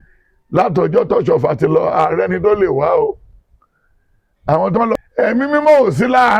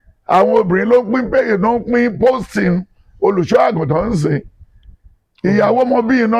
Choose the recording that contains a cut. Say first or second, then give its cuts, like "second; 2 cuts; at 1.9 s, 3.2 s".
first; 1 cut; at 5.1 s